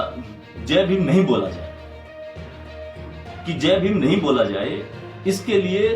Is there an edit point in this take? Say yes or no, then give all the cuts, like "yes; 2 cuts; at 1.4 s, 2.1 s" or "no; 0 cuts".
yes; 2 cuts; at 1.5 s, 3.4 s